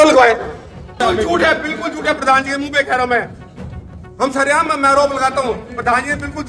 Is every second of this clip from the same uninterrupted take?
no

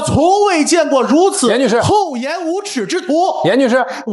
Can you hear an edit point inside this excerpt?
no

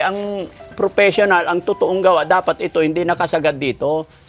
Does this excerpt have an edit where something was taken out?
no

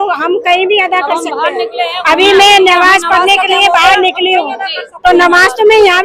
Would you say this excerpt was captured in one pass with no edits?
yes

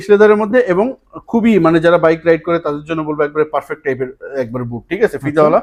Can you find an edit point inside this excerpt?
no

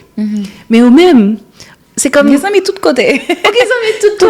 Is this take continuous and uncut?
yes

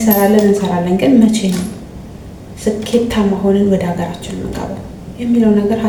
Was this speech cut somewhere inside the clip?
no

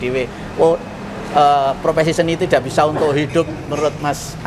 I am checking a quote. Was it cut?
no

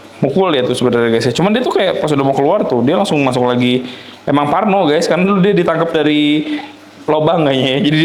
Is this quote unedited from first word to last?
yes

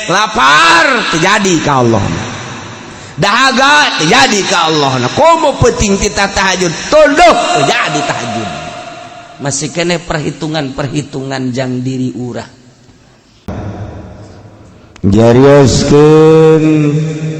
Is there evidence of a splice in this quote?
yes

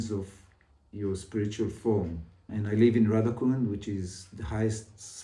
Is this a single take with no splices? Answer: no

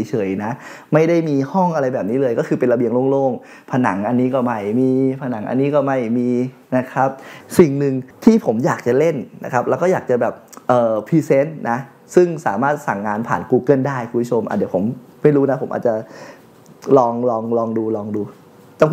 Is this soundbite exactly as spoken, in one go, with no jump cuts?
no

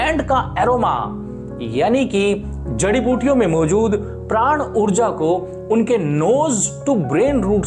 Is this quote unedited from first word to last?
yes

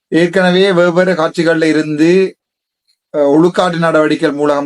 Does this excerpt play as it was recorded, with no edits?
yes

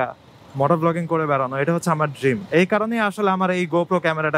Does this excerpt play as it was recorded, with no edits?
yes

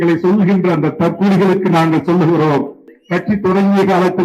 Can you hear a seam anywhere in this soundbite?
yes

